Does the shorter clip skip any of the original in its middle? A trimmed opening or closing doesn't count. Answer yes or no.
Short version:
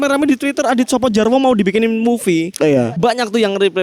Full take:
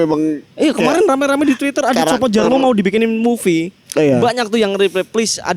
no